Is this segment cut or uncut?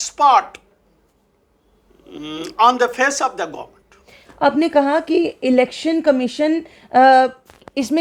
uncut